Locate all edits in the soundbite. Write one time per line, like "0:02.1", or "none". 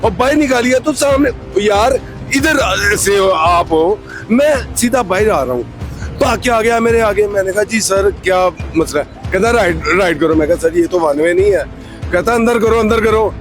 none